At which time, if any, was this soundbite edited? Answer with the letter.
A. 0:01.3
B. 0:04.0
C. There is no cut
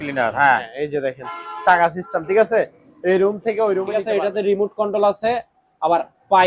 B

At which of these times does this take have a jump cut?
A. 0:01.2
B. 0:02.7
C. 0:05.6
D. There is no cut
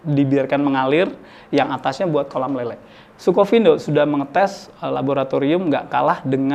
D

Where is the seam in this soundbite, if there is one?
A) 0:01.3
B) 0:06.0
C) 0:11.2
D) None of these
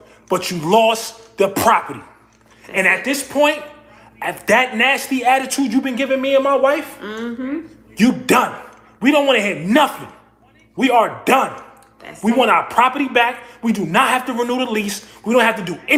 D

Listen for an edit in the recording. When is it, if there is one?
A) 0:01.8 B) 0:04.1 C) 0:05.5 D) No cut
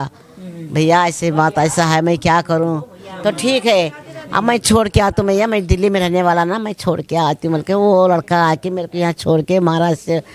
D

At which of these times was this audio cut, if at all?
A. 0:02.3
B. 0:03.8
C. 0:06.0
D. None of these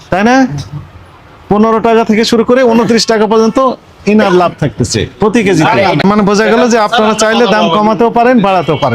C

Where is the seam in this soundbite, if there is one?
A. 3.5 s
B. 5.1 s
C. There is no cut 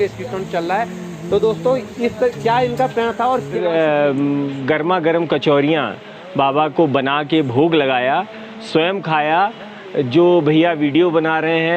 A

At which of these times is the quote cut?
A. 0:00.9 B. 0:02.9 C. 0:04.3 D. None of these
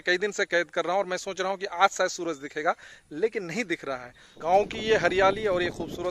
C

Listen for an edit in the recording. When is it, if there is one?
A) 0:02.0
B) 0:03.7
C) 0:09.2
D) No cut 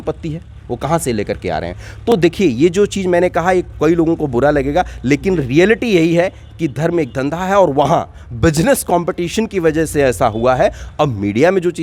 D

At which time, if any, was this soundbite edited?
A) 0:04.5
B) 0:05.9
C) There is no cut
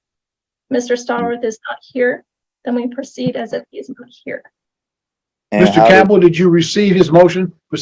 B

